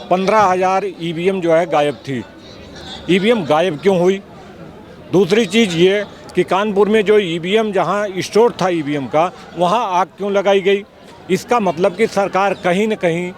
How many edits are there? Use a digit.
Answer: 0